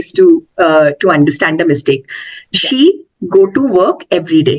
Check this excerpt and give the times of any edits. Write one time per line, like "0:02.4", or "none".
none